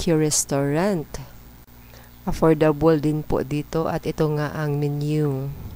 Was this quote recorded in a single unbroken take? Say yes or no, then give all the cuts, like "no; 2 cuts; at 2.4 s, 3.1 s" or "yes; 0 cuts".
yes; 0 cuts